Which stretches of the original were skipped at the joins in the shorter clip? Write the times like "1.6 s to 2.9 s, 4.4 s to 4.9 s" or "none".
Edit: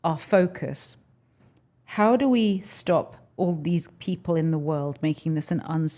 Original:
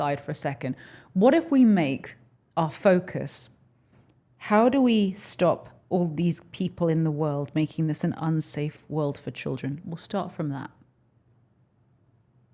none